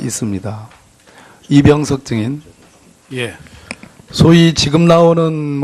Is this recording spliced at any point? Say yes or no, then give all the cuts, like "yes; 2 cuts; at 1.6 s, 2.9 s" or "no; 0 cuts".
yes; 1 cut; at 1.3 s